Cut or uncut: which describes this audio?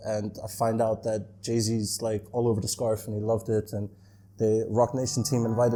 uncut